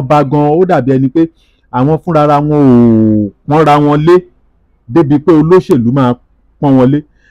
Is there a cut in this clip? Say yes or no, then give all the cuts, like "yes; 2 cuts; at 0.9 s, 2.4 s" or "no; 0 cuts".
no; 0 cuts